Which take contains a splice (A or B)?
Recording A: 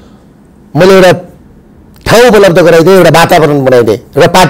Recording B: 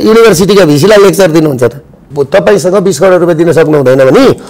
B